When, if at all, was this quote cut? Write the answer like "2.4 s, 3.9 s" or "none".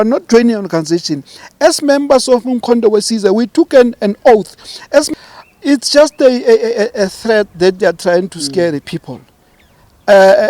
5.1 s